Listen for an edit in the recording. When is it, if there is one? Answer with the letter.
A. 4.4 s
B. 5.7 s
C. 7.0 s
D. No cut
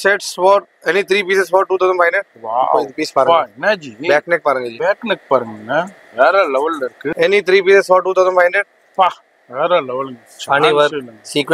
C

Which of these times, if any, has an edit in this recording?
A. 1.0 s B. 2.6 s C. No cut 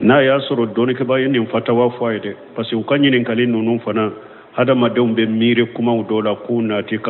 A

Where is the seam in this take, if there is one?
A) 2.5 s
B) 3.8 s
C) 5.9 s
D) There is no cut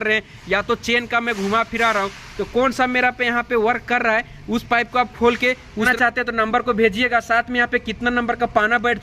C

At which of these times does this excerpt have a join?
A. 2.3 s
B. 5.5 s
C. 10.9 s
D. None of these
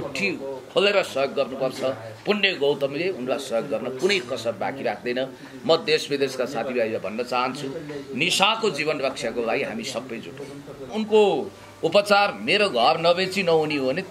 C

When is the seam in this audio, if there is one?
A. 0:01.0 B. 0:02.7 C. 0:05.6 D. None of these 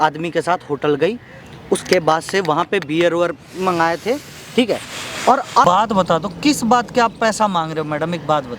C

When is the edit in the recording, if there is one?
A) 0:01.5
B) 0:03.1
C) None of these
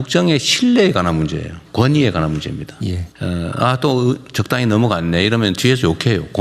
B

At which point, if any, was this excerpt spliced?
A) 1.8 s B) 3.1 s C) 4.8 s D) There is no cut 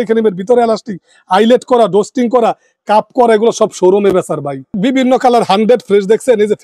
C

